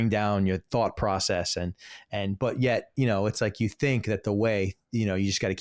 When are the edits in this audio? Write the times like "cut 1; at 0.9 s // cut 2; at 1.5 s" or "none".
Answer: none